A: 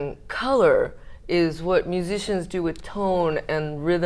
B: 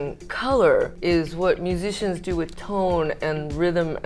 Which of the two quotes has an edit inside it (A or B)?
B